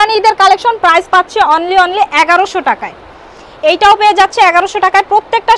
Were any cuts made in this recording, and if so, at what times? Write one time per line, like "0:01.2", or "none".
none